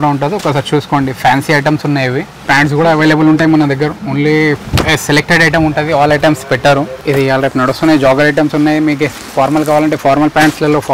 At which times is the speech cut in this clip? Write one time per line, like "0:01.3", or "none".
0:02.3
0:07.0